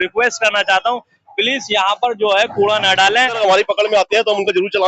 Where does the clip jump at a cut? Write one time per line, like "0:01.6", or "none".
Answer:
0:03.4